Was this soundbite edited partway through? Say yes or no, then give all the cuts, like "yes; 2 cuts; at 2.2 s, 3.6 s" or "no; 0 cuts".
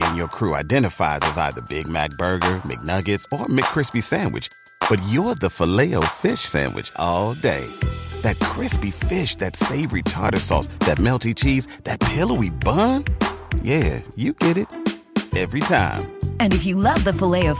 no; 0 cuts